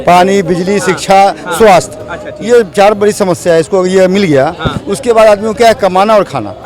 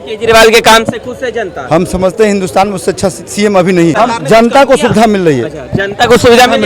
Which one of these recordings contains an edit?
second; 1 cut; at 3.9 s

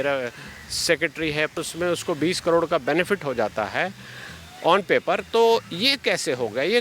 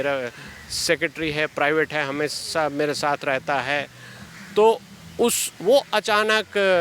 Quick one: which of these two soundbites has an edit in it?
first; 1 cut; at 1.5 s

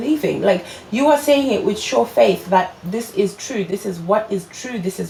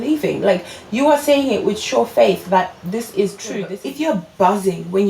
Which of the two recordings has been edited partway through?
second; 1 cut; at 3.8 s

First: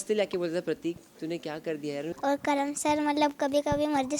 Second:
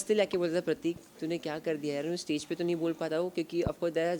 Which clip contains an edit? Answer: first; 1 cut; at 2.1 s

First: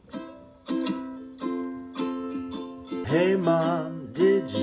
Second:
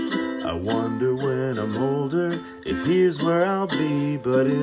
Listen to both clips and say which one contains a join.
first; 1 cut; at 3.0 s

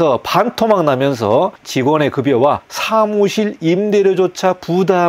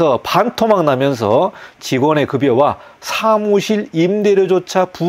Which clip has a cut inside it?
first; 2 cuts; at 1.6 s, 2.7 s

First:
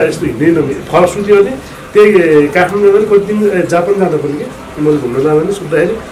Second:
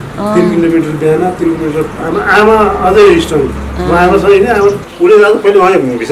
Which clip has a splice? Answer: second; 1 cut; at 4.9 s

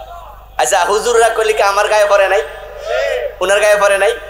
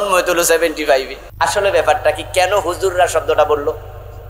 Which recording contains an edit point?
second; 1 cut; at 1.2 s

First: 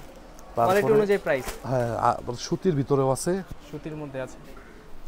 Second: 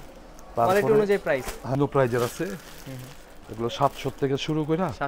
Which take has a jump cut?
second; 1 cut; at 1.8 s

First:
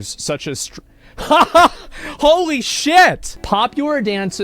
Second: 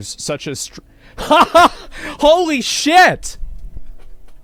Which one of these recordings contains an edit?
first; 1 cut; at 3.3 s

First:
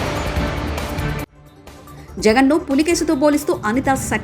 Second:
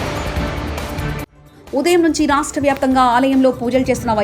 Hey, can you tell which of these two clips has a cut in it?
first; 1 cut; at 1.5 s

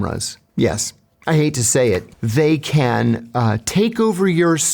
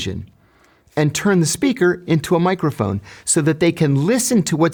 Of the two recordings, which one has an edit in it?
first; 1 cut; at 2.2 s

